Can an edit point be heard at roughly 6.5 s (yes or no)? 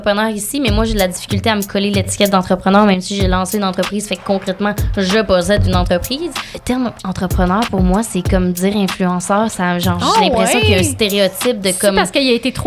yes